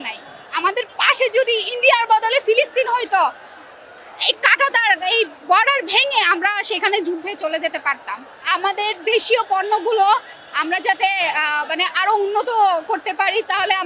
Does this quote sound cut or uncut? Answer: uncut